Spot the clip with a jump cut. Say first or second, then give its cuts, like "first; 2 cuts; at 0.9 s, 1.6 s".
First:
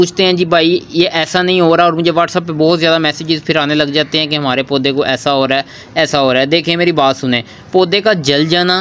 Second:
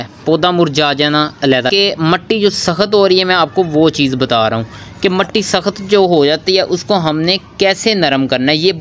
second; 1 cut; at 1.7 s